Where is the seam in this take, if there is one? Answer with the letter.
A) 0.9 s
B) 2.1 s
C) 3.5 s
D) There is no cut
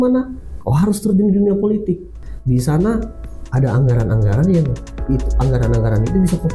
B